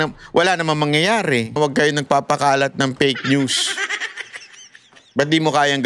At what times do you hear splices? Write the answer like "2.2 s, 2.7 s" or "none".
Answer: 1.6 s